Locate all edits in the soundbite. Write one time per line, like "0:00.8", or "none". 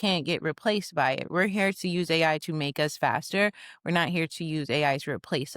0:01.3